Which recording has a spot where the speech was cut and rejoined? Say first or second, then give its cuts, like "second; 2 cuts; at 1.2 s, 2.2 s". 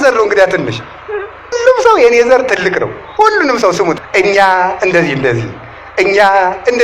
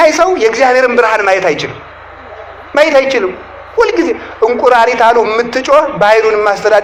first; 2 cuts; at 1.6 s, 4.0 s